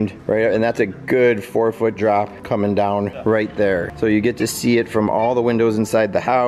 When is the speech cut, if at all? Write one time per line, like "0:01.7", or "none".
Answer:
none